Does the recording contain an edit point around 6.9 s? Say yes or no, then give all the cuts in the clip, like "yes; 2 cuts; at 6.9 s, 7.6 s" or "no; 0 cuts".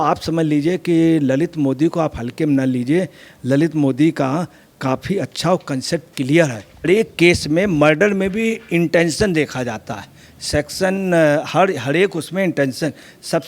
yes; 1 cut; at 6.9 s